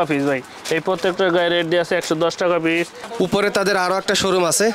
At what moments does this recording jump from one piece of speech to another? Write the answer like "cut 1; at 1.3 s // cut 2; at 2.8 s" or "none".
cut 1; at 3.0 s